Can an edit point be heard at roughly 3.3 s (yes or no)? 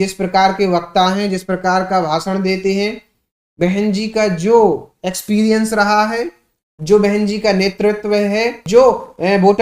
no